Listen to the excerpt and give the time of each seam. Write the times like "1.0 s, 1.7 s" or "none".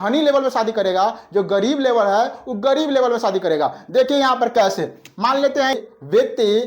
5.7 s